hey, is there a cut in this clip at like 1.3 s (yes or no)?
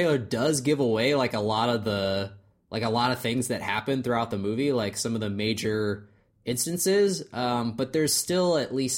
no